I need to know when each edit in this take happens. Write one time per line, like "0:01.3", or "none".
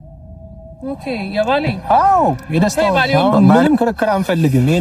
0:03.2